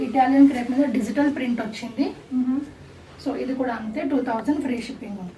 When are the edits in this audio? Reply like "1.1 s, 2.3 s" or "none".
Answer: none